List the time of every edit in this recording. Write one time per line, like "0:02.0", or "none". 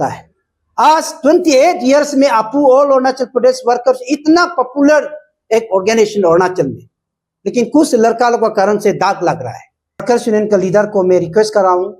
0:10.0

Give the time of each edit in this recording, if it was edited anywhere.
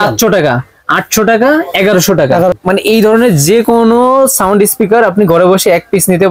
0:02.5

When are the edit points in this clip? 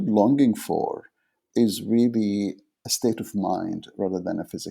0:01.4
0:02.8

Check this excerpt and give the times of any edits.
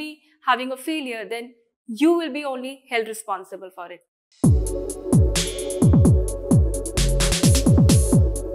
0:04.2

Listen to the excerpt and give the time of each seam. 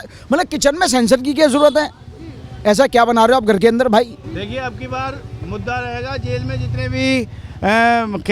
none

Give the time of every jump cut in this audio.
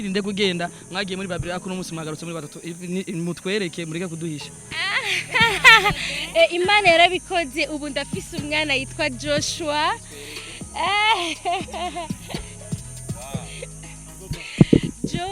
none

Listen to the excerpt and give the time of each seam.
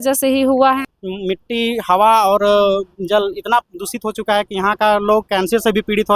0:00.9

